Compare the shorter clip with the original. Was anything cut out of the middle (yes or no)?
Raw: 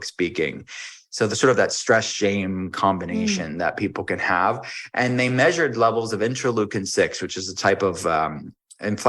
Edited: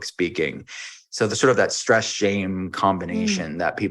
no